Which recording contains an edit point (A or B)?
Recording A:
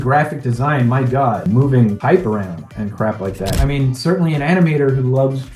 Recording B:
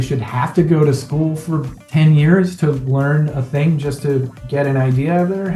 A